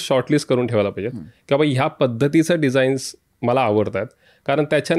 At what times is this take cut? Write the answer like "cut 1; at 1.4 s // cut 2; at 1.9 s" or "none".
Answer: none